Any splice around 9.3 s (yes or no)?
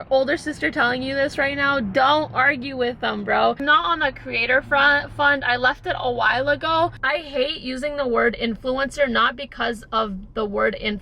no